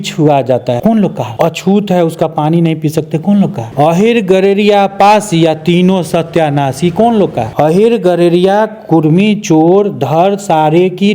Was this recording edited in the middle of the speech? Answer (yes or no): yes